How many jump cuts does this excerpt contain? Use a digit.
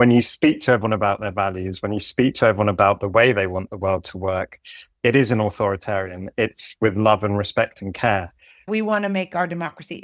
2